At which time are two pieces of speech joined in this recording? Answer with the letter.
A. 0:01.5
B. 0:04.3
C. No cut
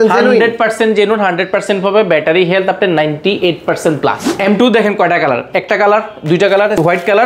B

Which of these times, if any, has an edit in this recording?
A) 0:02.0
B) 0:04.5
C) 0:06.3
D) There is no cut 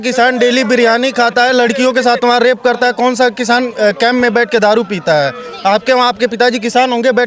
D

